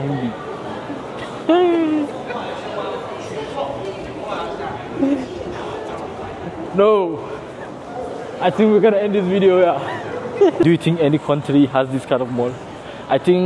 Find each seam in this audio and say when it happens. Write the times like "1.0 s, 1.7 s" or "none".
10.6 s